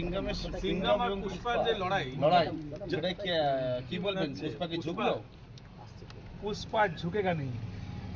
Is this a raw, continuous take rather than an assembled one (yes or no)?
yes